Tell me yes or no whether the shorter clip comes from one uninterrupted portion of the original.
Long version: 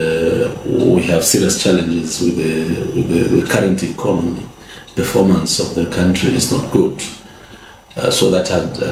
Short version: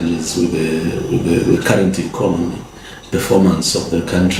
yes